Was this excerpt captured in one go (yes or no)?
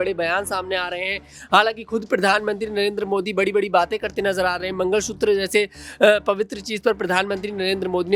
yes